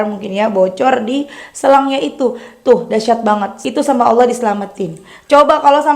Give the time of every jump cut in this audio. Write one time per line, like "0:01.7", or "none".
0:03.5